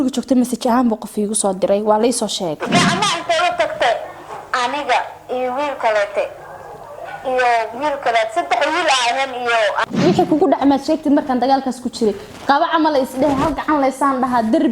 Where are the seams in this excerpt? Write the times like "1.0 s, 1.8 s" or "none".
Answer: 2.6 s, 9.8 s